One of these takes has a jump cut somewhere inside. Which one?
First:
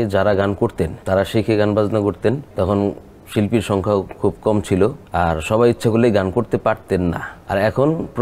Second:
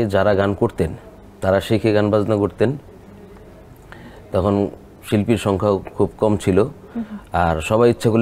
first; 4 cuts; at 1.0 s, 2.5 s, 5.0 s, 7.3 s

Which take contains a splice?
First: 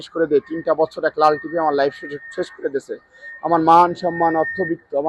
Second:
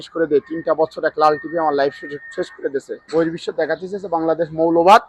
second; 1 cut; at 3.0 s

